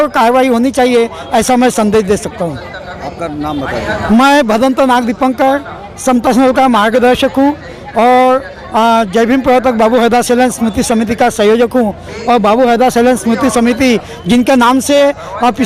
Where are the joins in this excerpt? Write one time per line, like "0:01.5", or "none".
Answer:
none